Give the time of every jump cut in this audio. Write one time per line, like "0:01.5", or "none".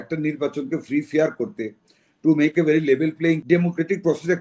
0:03.4